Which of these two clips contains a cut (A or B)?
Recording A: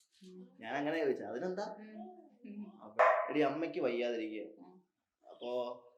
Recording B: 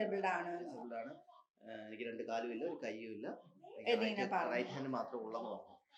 A